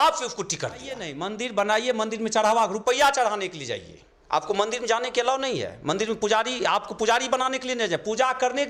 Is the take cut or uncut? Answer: cut